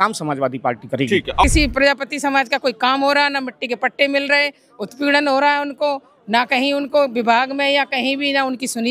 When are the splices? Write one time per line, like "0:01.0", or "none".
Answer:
0:01.4